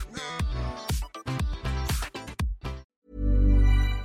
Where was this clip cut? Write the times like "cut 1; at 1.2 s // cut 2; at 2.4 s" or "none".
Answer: cut 1; at 2.9 s